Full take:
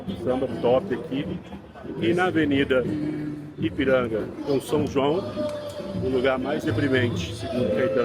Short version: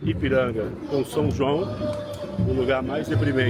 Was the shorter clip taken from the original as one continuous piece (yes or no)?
yes